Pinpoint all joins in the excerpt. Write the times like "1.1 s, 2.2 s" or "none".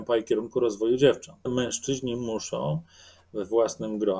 1.5 s